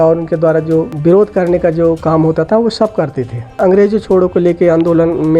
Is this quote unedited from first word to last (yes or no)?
no